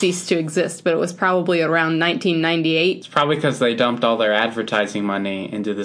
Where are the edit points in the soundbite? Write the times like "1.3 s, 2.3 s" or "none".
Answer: 3.0 s